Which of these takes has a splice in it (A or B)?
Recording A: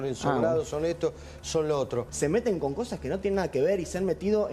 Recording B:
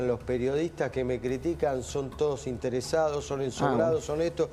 A